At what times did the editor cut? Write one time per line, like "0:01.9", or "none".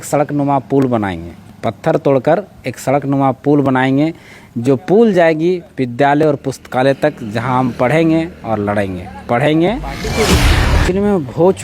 0:10.5